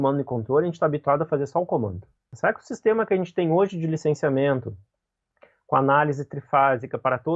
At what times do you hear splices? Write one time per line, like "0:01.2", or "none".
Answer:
0:02.3